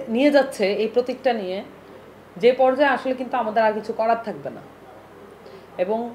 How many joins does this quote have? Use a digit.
0